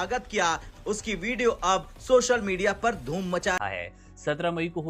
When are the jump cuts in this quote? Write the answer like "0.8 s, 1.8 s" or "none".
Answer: 3.6 s

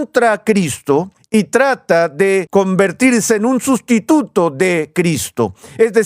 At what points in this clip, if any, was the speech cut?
1.2 s, 2.5 s

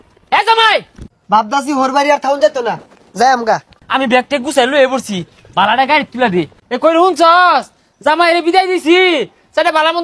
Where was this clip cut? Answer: 1.0 s, 3.7 s, 6.6 s

